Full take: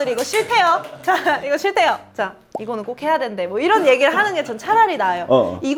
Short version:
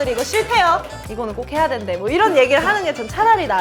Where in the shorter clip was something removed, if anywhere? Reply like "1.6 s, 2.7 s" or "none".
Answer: 0.9 s